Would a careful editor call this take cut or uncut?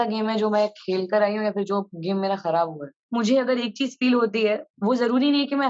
cut